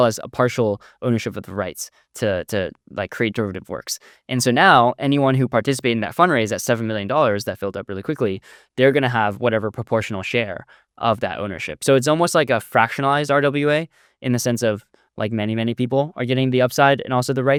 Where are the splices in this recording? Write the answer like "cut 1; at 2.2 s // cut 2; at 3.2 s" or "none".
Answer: none